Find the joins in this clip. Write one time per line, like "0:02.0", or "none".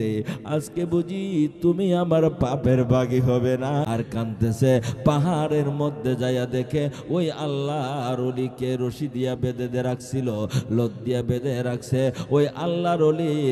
0:03.9